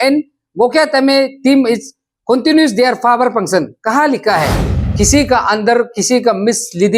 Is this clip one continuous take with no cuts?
no; 1 cut; at 4.7 s

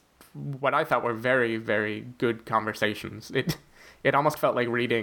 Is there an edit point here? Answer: no; 0 cuts

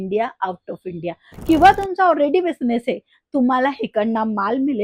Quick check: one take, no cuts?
no; 1 cut; at 1.3 s

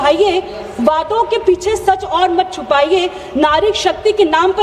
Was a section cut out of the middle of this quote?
no; 0 cuts

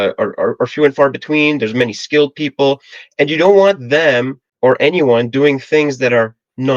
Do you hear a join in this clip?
yes; 1 cut; at 4.4 s

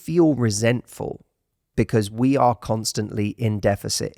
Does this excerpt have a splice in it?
no; 0 cuts

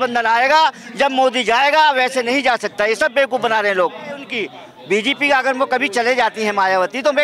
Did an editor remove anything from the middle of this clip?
yes; 1 cut; at 4.2 s

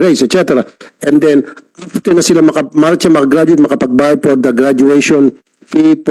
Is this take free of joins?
yes; 0 cuts

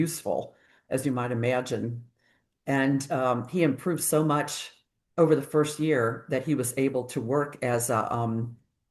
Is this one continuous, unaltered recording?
yes; 0 cuts

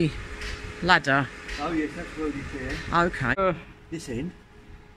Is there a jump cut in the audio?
yes; 1 cut; at 3.4 s

